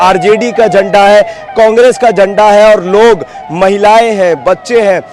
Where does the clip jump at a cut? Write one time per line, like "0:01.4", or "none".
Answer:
none